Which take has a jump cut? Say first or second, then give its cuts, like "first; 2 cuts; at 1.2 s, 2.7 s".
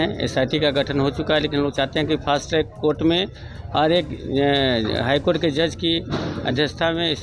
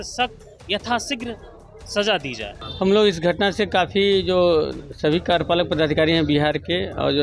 second; 1 cut; at 2.6 s